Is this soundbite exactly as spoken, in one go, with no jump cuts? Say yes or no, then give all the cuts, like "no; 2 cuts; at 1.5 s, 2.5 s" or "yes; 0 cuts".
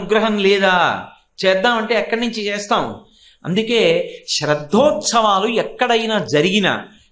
yes; 0 cuts